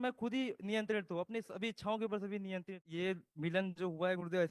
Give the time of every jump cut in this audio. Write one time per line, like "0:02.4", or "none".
0:02.9